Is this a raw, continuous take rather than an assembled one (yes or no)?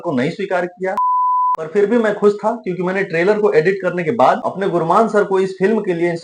no